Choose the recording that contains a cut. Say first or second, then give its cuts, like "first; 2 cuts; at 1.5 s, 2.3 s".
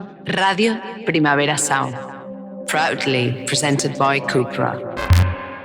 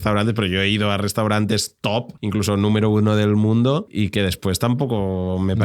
second; 2 cuts; at 2.2 s, 3.9 s